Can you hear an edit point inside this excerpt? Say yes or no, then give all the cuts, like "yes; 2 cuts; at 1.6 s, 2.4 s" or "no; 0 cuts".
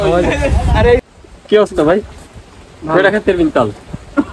yes; 1 cut; at 1.0 s